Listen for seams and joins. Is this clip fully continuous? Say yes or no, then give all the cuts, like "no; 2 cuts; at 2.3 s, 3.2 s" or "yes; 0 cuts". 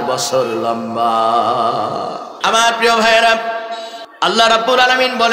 no; 1 cut; at 2.3 s